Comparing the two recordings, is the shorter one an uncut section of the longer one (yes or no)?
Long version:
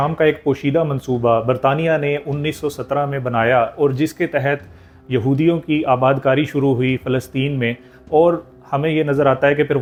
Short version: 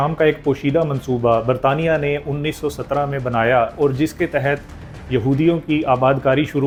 yes